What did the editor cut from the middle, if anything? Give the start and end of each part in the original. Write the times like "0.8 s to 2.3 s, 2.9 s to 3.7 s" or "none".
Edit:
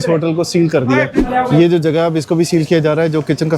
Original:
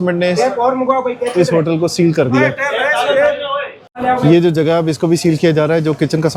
2.6 s to 3.9 s